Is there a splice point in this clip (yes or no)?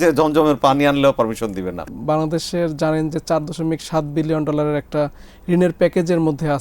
yes